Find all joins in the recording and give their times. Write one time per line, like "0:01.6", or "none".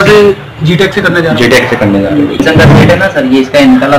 0:02.4

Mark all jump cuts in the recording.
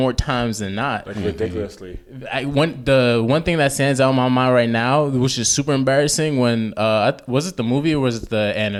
none

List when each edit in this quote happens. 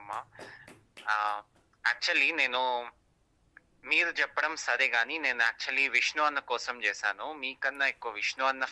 none

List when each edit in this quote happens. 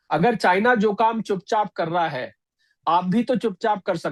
none

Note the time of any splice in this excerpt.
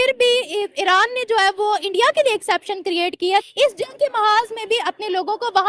0:03.5

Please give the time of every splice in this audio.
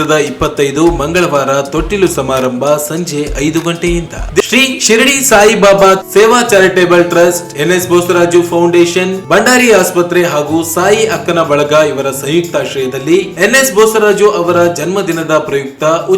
0:04.4

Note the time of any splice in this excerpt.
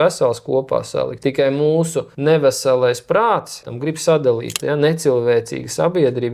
0:01.1
0:02.1
0:03.7
0:04.6

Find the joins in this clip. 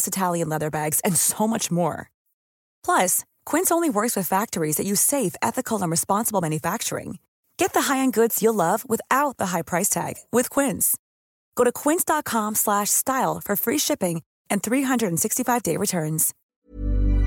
0:16.3

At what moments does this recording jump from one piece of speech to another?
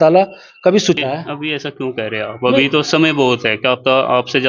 0:01.0

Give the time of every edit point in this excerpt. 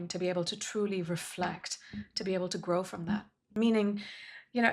0:03.4

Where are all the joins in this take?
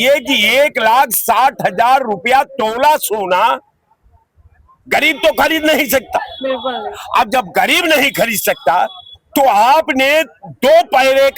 none

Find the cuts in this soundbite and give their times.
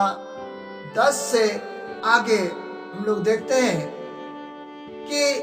0:01.9

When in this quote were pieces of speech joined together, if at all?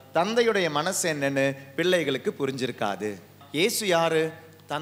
0:03.4

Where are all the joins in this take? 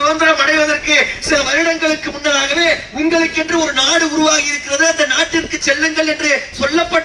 none

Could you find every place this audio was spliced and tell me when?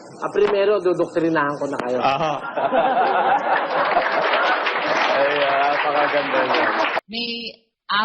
0:07.0

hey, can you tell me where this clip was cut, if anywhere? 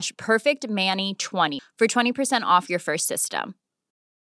0:01.6

